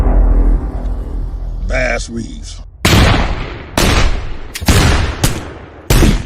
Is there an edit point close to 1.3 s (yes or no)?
yes